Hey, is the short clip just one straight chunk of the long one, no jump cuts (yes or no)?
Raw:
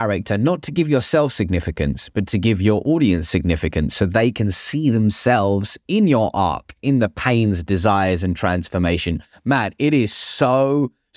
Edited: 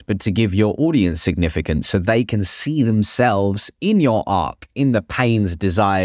yes